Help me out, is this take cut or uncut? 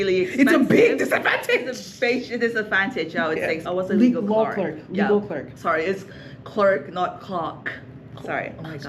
cut